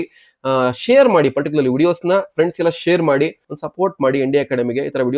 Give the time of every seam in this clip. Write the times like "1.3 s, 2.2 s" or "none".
3.5 s